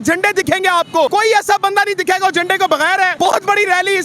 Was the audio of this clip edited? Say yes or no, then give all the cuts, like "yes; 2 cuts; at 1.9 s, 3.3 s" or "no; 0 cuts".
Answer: yes; 2 cuts; at 1.1 s, 3.1 s